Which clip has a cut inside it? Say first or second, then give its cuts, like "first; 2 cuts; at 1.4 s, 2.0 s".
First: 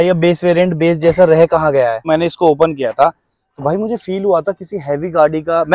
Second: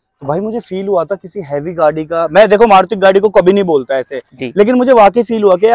first; 1 cut; at 2.0 s